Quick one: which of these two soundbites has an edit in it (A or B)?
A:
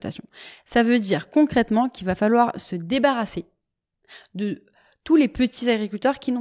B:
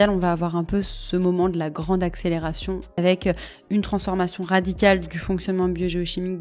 B